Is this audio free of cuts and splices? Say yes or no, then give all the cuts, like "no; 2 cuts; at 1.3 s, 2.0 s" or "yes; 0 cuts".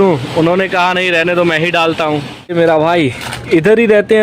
no; 1 cut; at 2.5 s